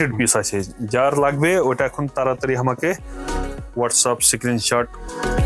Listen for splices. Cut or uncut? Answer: uncut